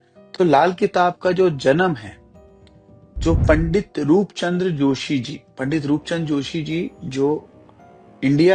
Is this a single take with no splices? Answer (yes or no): yes